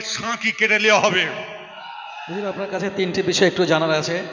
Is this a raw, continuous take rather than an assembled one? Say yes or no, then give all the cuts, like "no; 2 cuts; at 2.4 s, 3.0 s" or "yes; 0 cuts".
no; 1 cut; at 2.3 s